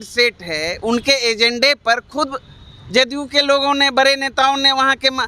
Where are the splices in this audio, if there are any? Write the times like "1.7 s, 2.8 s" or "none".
none